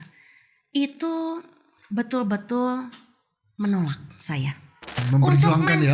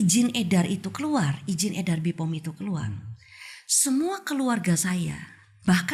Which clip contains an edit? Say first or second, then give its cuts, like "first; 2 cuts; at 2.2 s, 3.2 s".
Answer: first; 1 cut; at 4.9 s